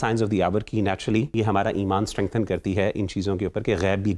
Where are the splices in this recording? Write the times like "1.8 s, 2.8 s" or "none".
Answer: 1.3 s